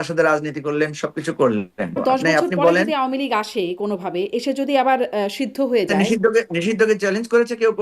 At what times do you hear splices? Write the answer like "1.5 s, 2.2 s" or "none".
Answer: 2.0 s, 5.9 s